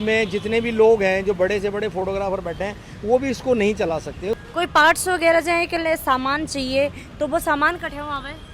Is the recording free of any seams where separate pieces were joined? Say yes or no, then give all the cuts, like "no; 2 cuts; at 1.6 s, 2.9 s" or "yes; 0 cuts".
no; 1 cut; at 4.4 s